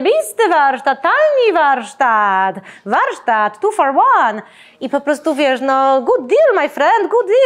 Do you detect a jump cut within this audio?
no; 0 cuts

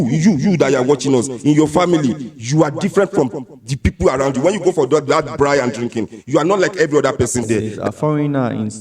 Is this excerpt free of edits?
no; 1 cut; at 7.7 s

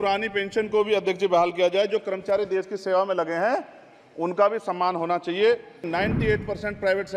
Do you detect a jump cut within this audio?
yes; 1 cut; at 5.9 s

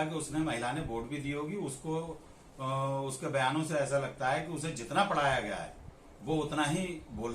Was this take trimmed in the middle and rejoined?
no; 0 cuts

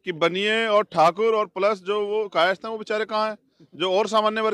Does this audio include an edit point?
no; 0 cuts

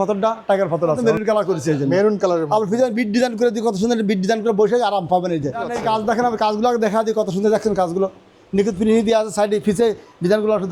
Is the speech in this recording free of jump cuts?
no; 2 cuts; at 1.0 s, 5.7 s

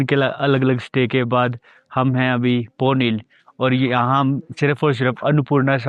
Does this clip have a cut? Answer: no; 0 cuts

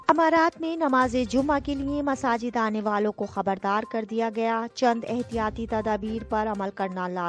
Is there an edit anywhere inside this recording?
no; 0 cuts

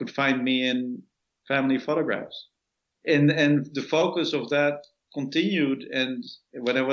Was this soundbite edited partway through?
yes; 1 cut; at 2.5 s

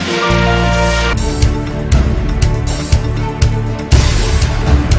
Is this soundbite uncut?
no; 1 cut; at 1.1 s

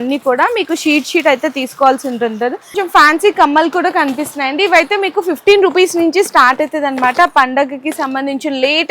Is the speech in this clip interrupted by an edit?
yes; 1 cut; at 2.8 s

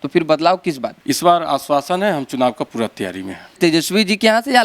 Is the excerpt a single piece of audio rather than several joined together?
no; 2 cuts; at 0.9 s, 3.6 s

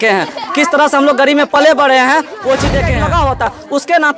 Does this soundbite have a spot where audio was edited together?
yes; 1 cut; at 2.9 s

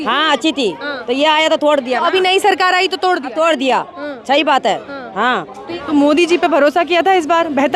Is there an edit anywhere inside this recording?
yes; 1 cut; at 5.8 s

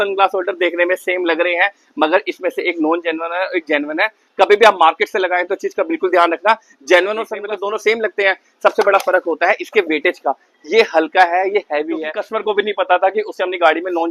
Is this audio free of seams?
no; 2 cuts; at 7.4 s, 12.2 s

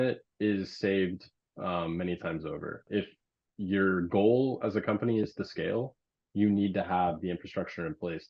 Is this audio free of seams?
no; 1 cut; at 2.9 s

